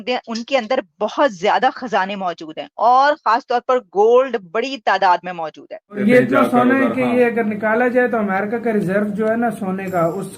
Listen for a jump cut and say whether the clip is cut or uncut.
cut